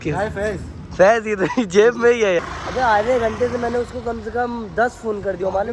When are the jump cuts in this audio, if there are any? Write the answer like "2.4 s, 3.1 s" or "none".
2.4 s